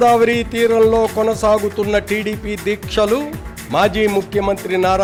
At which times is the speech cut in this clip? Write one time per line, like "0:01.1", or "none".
none